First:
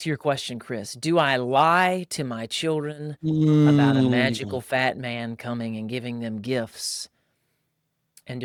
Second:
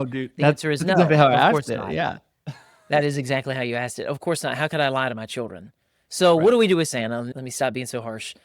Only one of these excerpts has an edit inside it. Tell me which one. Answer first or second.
second